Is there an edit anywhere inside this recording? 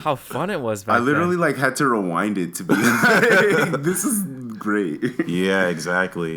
no; 0 cuts

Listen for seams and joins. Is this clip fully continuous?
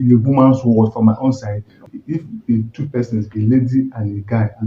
no; 1 cut; at 1.9 s

